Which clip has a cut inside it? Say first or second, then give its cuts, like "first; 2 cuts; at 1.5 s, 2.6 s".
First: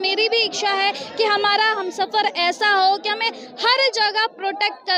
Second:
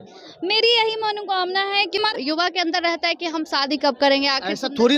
second; 1 cut; at 2.1 s